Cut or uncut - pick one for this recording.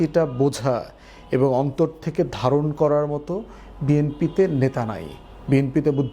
uncut